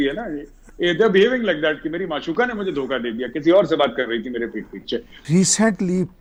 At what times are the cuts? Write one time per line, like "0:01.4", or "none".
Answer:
none

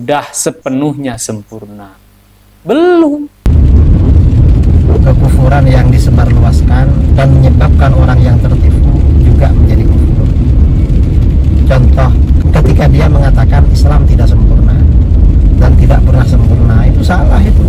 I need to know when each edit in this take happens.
0:03.4

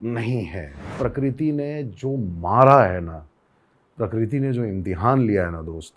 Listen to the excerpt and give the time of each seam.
0:00.9

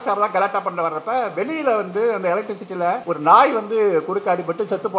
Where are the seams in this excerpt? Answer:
0:03.0

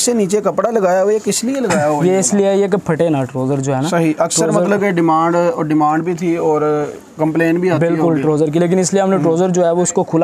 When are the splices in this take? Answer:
none

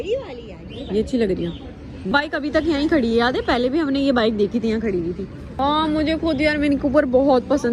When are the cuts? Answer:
none

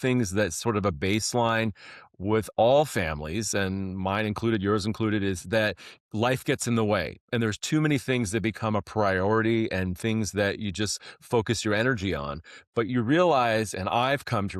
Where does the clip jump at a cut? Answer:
none

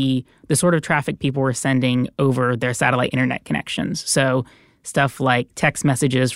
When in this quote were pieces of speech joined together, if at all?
none

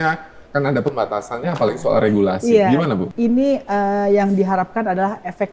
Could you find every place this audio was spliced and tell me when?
0:03.0

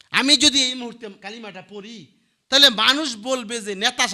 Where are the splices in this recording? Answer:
0:01.2

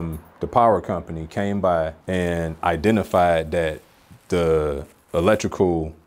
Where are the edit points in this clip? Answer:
0:02.0

